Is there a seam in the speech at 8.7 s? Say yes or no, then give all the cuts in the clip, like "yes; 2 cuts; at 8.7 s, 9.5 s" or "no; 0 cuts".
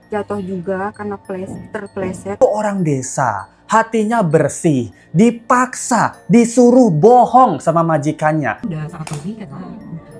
yes; 2 cuts; at 2.4 s, 8.7 s